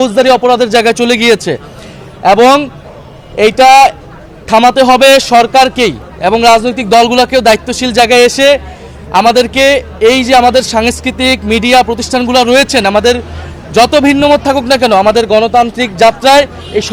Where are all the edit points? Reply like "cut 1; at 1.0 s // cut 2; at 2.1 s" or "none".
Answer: none